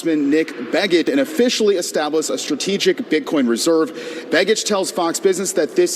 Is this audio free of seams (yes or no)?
no